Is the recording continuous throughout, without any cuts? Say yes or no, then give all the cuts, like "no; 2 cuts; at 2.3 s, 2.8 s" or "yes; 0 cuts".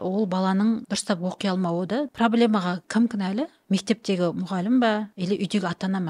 no; 4 cuts; at 0.9 s, 2.1 s, 2.8 s, 5.1 s